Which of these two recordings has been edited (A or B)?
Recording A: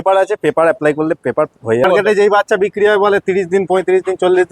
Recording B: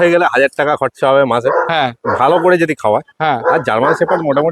A